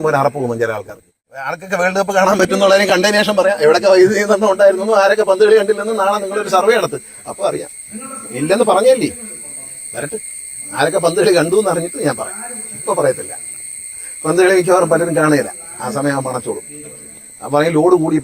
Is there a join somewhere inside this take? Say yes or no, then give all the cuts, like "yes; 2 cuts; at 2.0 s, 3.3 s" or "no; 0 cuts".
yes; 1 cut; at 1.6 s